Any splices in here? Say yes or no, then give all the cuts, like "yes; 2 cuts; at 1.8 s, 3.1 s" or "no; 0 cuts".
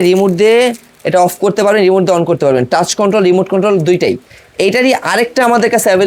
no; 0 cuts